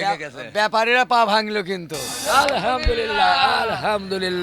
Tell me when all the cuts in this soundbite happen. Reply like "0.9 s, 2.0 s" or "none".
2.1 s

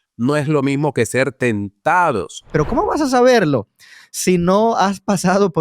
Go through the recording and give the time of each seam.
2.5 s

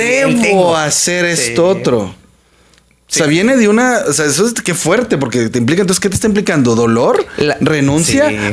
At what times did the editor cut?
none

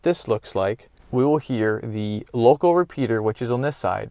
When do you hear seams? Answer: 0.9 s

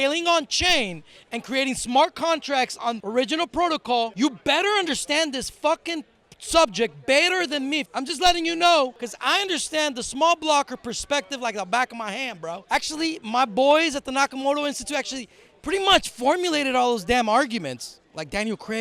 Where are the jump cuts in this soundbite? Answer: 2.8 s, 4.1 s, 7.9 s, 9.1 s, 12.6 s

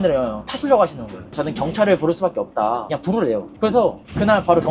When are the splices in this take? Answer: 1.4 s, 2.9 s

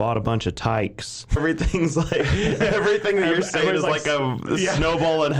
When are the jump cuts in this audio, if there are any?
1.4 s

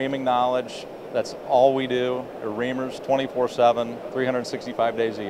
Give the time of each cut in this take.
none

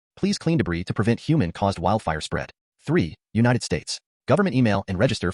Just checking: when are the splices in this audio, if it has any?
2.6 s

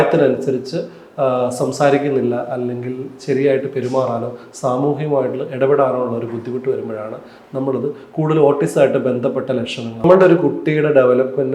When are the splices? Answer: 10.0 s

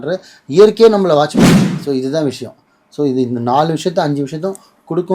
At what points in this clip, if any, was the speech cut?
1.7 s

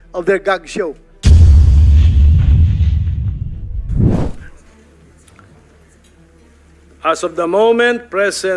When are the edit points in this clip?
1.1 s

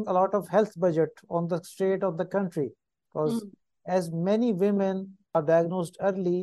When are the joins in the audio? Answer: 5.3 s

